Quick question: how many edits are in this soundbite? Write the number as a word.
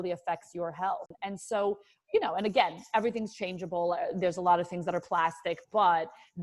one